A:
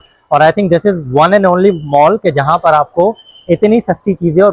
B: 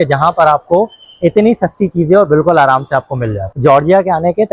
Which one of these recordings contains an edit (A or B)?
B